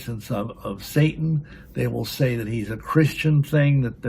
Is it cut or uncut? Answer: uncut